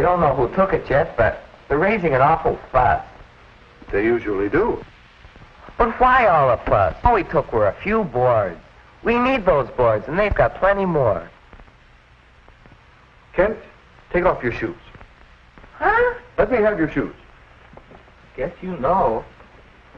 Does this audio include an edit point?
yes; 1 cut; at 14.3 s

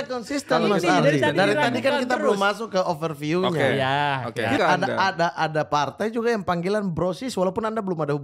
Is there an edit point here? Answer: yes; 1 cut; at 4.6 s

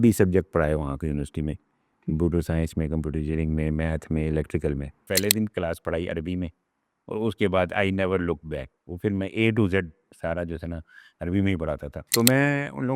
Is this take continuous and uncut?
no; 2 cuts; at 5.0 s, 11.9 s

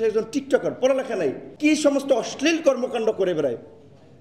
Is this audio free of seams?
no; 1 cut; at 1.5 s

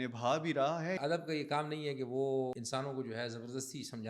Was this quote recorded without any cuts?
no; 2 cuts; at 1.0 s, 2.6 s

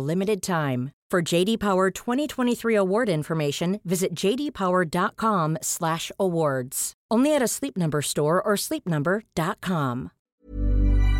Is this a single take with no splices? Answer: no; 1 cut; at 10.2 s

